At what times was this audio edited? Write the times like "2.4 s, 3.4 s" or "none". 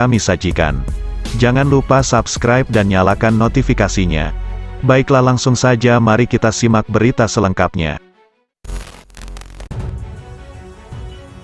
9.7 s